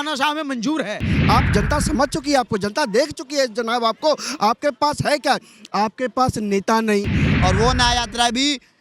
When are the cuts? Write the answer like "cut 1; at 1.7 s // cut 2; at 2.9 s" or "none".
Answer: cut 1; at 1.1 s // cut 2; at 7.3 s